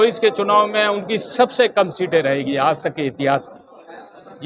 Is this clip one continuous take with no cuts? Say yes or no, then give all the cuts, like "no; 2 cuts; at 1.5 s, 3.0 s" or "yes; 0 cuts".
yes; 0 cuts